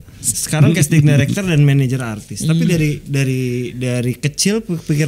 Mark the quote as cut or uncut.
uncut